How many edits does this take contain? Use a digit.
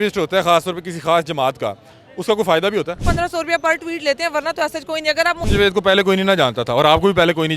2